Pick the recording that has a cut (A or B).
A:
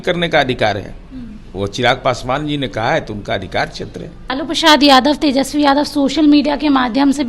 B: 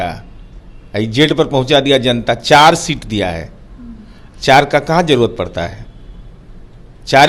A